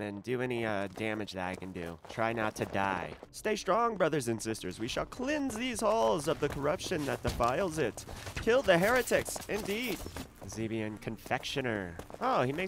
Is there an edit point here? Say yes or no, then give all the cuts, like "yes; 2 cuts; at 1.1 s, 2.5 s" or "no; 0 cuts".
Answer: yes; 2 cuts; at 3.2 s, 10.3 s